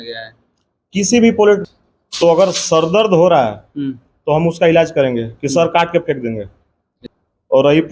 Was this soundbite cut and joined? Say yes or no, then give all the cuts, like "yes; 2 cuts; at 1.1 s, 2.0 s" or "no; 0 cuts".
yes; 2 cuts; at 1.7 s, 7.0 s